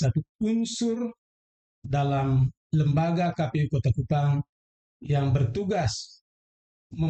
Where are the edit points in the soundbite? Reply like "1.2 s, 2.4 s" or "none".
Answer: none